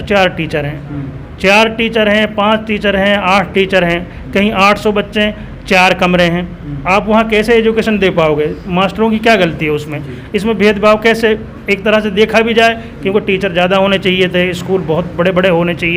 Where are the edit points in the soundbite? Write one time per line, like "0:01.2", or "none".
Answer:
none

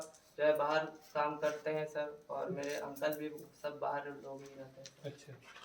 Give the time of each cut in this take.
none

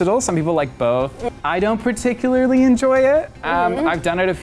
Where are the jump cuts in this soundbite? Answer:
0:01.1

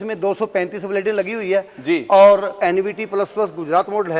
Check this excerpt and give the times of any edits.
0:02.6

